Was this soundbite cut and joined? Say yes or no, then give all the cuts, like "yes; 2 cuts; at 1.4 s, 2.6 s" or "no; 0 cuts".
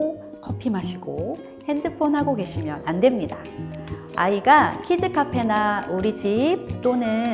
no; 0 cuts